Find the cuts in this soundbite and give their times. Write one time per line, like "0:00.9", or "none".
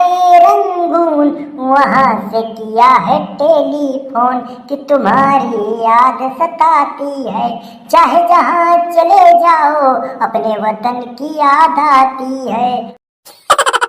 0:12.9

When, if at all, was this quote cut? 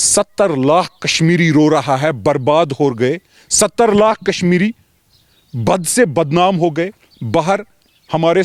none

